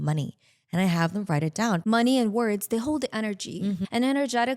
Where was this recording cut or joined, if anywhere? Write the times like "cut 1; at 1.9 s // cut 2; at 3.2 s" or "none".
cut 1; at 1.8 s // cut 2; at 3.8 s

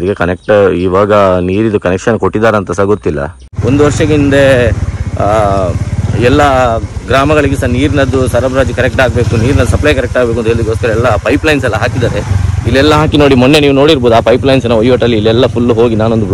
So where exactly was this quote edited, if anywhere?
cut 1; at 3.5 s

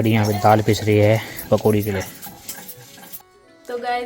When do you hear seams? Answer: cut 1; at 3.2 s

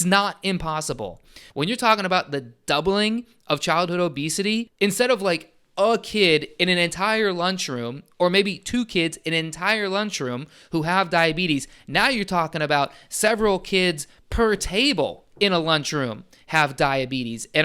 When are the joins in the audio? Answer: cut 1; at 1.4 s // cut 2; at 4.7 s

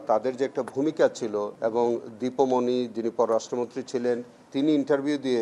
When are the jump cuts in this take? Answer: cut 1; at 1.5 s

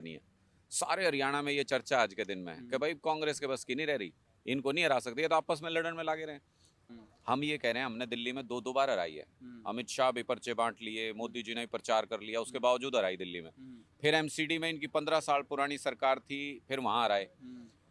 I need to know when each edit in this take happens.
cut 1; at 6.7 s

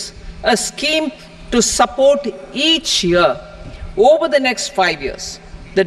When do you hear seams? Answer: none

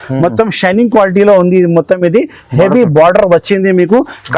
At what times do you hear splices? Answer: none

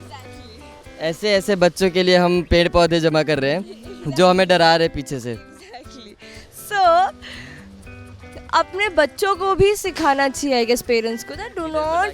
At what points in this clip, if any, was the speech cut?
none

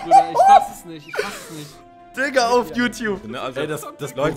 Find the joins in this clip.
cut 1; at 3.2 s

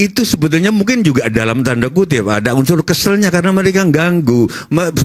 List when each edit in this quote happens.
none

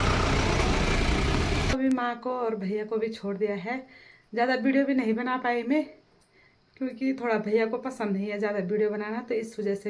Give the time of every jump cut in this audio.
cut 1; at 1.7 s

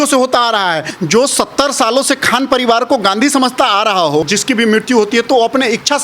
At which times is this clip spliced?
cut 1; at 0.9 s // cut 2; at 4.3 s

